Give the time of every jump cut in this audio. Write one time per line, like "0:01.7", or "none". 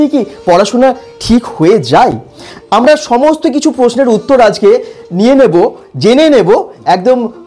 none